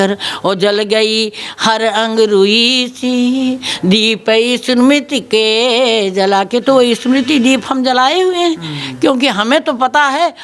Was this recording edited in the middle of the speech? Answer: no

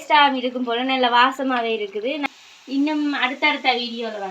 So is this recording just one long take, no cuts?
no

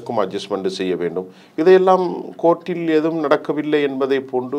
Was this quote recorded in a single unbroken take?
yes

